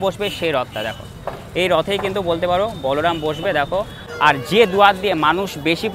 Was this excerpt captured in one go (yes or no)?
no